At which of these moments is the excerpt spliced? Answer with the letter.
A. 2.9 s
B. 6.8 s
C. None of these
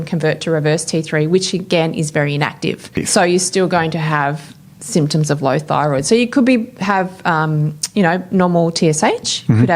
A